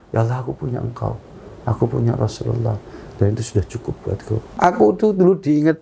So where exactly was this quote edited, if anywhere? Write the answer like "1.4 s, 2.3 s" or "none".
4.5 s